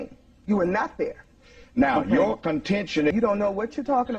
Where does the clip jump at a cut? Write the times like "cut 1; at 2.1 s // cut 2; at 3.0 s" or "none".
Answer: cut 1; at 3.1 s